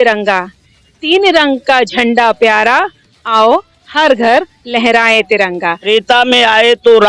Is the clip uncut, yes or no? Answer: no